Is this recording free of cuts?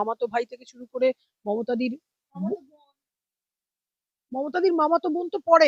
yes; 0 cuts

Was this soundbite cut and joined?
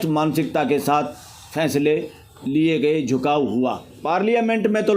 yes; 1 cut; at 3.9 s

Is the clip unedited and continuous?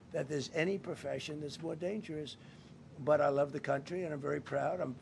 yes; 0 cuts

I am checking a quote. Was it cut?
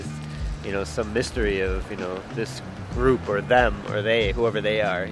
no; 0 cuts

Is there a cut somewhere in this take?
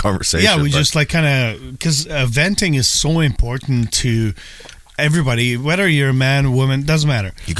no; 0 cuts

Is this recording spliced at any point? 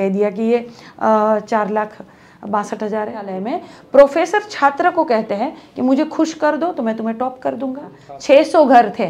yes; 2 cuts; at 3.3 s, 8.1 s

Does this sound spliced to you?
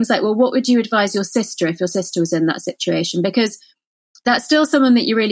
no; 0 cuts

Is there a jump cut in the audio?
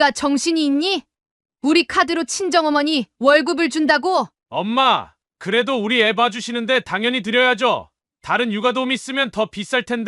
yes; 1 cut; at 4.4 s

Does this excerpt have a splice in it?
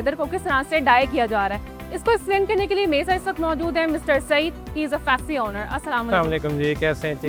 no; 0 cuts

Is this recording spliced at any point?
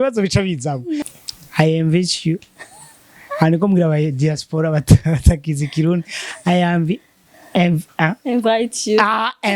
yes; 1 cut; at 1.0 s

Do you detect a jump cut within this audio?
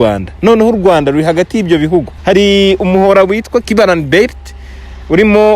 yes; 2 cuts; at 2.1 s, 3.7 s

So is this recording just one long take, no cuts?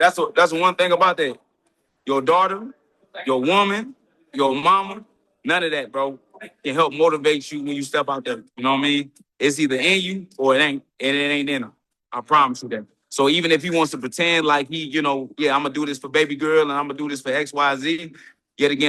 yes; 0 cuts

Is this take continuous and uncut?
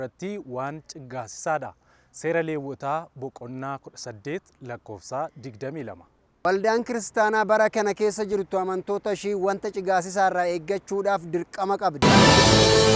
no; 1 cut; at 12.0 s

